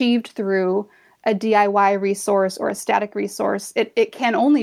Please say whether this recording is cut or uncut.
uncut